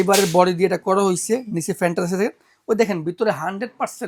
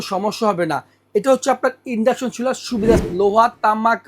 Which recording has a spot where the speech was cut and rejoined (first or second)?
second